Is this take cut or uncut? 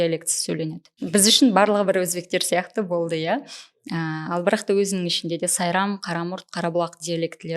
cut